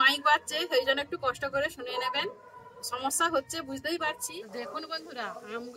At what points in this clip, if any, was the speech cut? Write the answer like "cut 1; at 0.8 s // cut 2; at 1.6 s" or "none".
cut 1; at 4.8 s